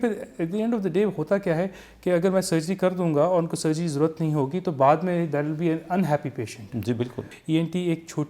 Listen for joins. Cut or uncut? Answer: cut